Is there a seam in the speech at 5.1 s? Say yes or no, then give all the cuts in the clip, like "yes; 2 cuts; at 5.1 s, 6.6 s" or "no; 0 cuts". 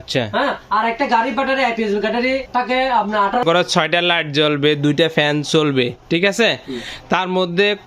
no; 2 cuts; at 2.5 s, 3.4 s